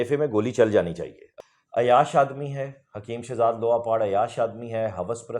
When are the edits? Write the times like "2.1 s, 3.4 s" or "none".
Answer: 1.3 s